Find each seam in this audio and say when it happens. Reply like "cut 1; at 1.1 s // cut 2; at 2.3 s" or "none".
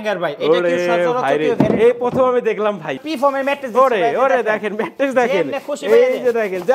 cut 1; at 3.0 s